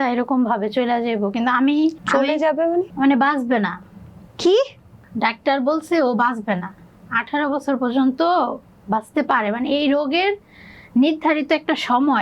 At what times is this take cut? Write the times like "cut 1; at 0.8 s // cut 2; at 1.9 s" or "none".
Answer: none